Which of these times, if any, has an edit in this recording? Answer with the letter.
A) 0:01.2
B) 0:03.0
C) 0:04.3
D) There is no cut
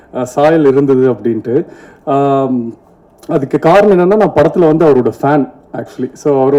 D